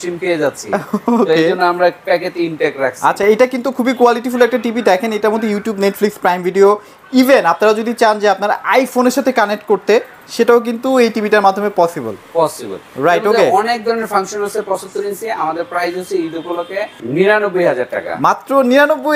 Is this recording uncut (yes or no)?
yes